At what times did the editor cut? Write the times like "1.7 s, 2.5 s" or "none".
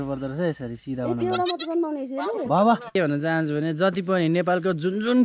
2.9 s